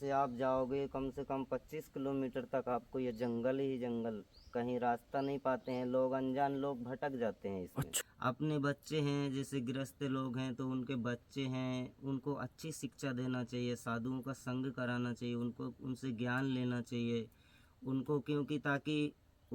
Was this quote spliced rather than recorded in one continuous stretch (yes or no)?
yes